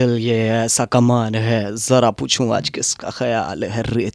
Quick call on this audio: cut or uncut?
uncut